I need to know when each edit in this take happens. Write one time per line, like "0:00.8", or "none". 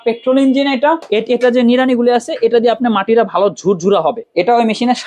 0:01.0
0:04.2